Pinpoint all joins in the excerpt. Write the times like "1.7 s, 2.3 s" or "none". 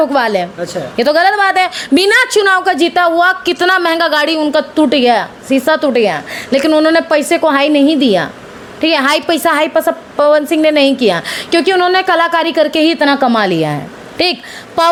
none